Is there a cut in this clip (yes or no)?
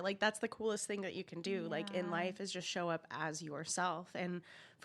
no